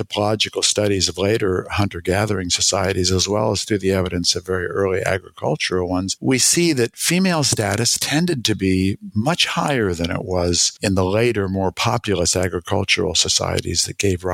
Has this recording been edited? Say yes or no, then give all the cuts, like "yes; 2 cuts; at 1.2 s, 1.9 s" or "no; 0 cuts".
no; 0 cuts